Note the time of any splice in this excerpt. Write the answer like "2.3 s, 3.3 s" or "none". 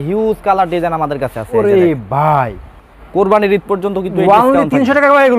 2.8 s